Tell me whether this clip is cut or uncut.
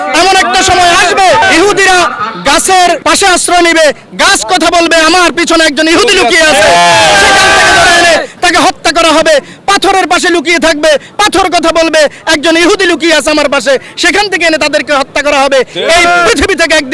cut